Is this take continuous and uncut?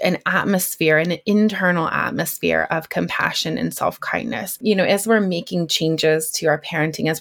no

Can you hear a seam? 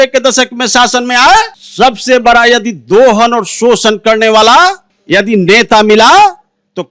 yes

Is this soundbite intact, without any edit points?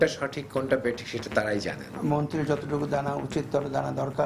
no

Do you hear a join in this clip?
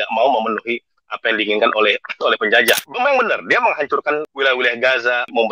yes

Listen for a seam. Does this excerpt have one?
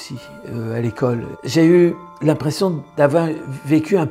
yes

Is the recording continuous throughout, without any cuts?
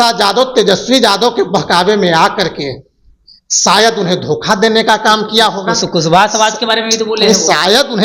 yes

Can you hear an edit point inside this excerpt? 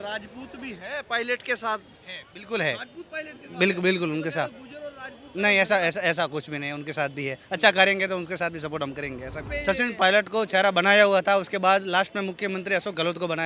yes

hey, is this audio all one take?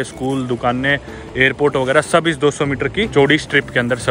no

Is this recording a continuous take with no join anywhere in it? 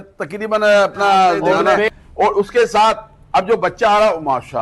no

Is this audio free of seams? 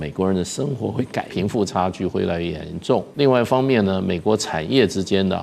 no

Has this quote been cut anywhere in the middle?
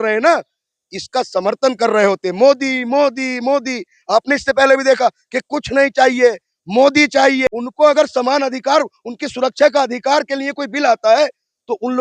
yes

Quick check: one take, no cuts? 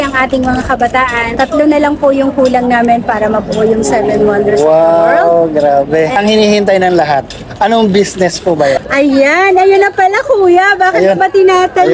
no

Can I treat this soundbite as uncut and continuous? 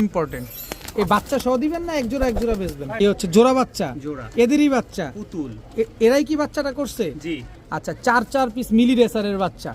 no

